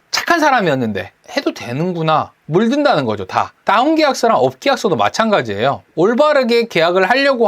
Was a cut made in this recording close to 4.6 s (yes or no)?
no